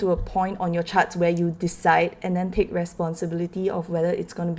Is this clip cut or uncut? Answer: uncut